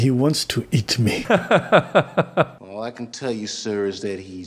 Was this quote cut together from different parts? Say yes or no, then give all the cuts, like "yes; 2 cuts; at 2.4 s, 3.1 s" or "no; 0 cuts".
yes; 2 cuts; at 1.2 s, 2.6 s